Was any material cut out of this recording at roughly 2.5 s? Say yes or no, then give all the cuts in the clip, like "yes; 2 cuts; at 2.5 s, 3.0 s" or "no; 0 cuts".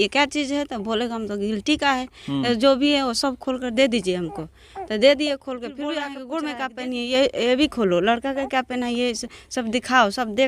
no; 1 cut; at 6.1 s